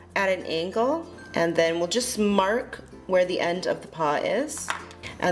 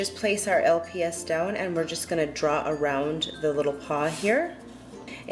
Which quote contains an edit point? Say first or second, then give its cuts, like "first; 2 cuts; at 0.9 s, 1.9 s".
first; 1 cut; at 3.0 s